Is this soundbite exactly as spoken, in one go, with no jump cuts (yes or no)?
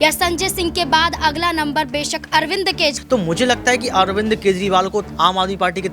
no